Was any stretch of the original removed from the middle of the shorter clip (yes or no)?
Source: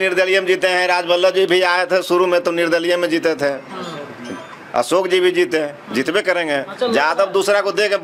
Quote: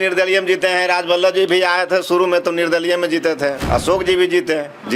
yes